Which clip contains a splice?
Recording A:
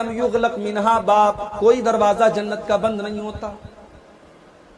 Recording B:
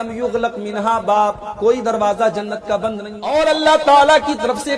B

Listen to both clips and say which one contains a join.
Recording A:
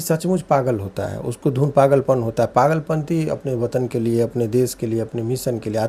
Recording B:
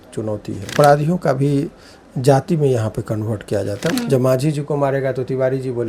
B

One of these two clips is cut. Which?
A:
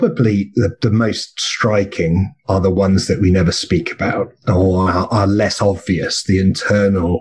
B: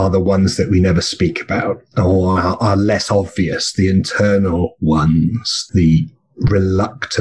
B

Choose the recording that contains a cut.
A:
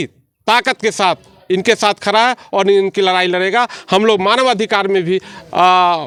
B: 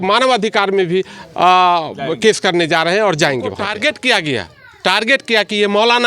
B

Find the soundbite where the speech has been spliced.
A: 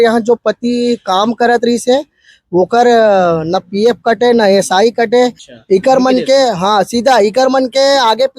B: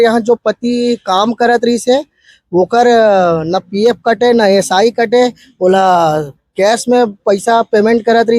A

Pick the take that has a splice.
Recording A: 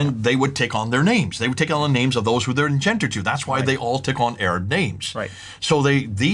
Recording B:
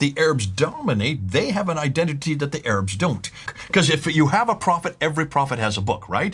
B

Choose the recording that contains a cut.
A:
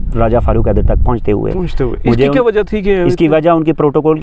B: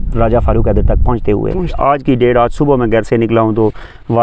B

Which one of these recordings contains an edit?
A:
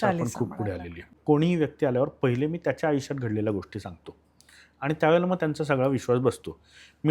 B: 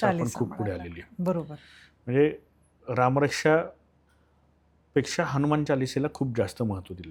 A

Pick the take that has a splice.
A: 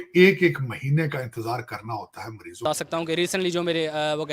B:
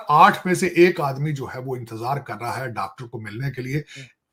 A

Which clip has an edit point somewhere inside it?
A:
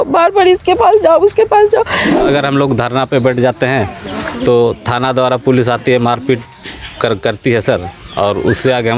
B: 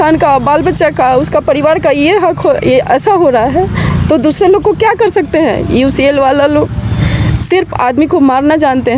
A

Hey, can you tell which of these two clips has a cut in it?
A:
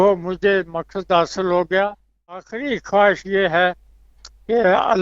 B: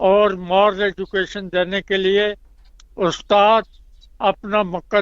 A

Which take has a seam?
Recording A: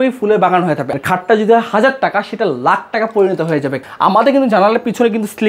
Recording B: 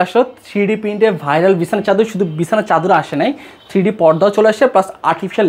A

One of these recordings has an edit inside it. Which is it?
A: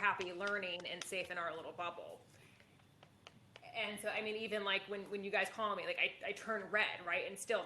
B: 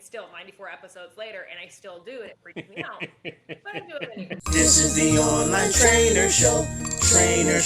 B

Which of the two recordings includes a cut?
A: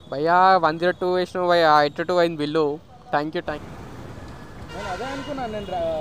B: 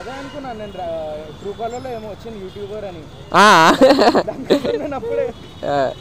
A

